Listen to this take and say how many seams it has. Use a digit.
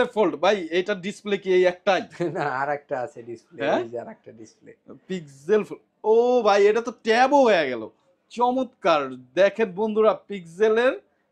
0